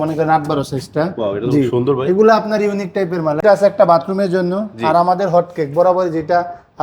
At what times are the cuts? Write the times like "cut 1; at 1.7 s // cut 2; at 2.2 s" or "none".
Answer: cut 1; at 3.4 s